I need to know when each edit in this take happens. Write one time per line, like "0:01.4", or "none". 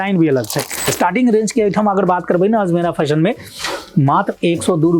0:00.9